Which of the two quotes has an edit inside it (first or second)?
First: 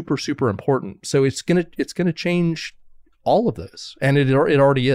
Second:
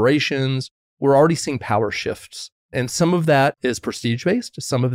second